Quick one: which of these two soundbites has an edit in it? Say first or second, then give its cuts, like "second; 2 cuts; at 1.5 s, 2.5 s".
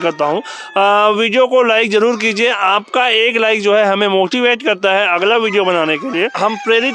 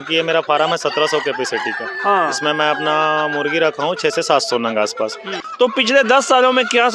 second; 1 cut; at 5.4 s